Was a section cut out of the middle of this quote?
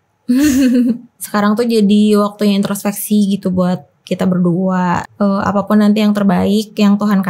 yes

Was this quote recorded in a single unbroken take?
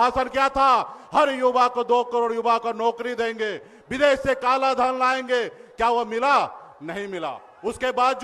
yes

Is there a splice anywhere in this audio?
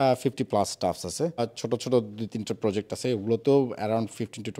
yes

